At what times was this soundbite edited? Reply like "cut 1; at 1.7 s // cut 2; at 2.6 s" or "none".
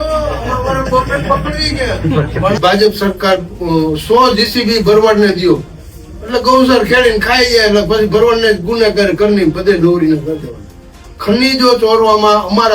cut 1; at 2.6 s